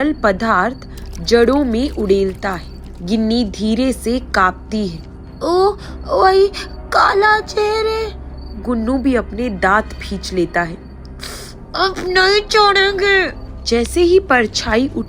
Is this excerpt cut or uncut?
uncut